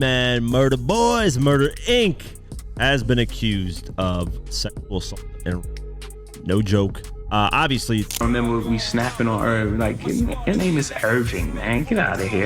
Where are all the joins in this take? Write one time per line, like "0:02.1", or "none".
0:08.1